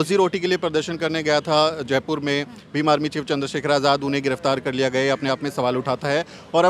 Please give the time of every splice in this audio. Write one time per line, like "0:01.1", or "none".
none